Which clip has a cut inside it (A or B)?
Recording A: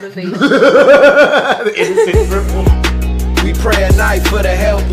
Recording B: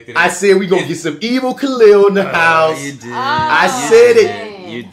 A